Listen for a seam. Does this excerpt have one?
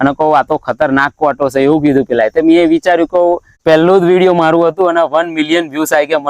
yes; 1 cut; at 3.6 s

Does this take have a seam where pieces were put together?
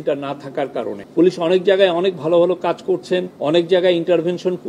yes; 2 cuts; at 1.0 s, 3.3 s

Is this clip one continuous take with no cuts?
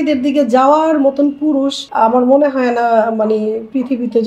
no; 1 cut; at 1.8 s

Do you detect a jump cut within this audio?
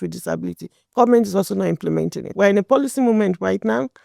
yes; 1 cut; at 2.2 s

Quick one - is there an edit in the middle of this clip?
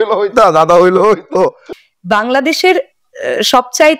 yes; 1 cut; at 1.7 s

